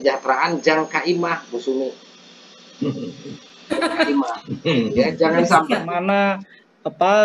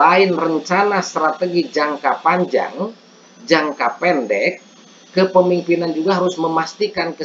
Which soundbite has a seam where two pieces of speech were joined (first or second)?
first